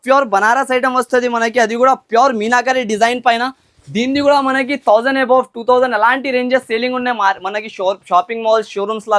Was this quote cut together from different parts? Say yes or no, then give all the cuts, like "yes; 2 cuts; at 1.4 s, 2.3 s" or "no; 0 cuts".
no; 0 cuts